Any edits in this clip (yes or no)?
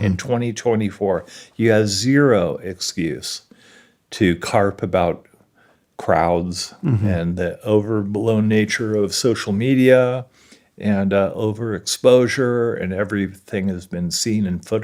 no